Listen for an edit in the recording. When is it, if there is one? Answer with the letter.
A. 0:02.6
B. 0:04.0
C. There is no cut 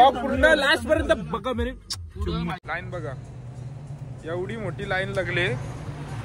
A